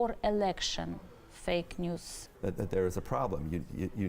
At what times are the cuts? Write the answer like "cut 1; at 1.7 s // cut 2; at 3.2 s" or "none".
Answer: cut 1; at 2.1 s